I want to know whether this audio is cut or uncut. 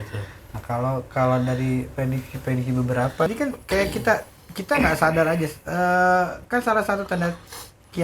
cut